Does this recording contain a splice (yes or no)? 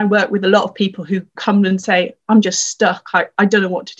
yes